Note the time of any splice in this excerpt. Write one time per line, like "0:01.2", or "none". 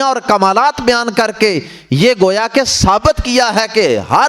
none

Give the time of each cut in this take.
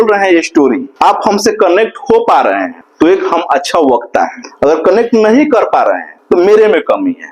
0:00.9
0:02.8
0:04.4
0:06.1

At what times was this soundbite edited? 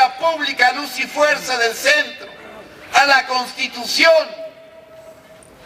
0:01.6

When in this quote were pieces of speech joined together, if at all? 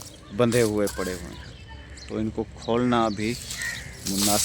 none

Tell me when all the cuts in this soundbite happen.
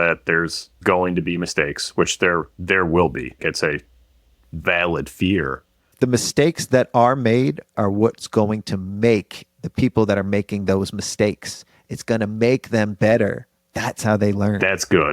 0:03.4
0:05.9
0:07.7

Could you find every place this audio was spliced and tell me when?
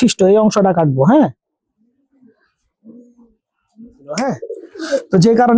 0:04.0

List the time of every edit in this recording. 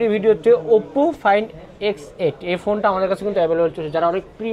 none

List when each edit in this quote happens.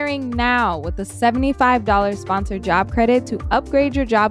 none

